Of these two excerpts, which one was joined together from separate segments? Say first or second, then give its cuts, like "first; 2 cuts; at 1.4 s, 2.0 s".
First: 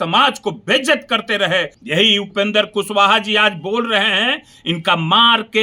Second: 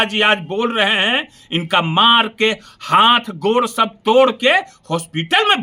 first; 1 cut; at 1.8 s